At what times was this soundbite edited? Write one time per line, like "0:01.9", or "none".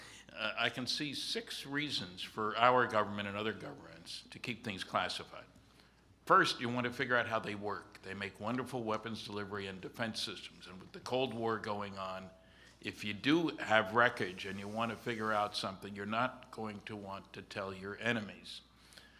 0:05.3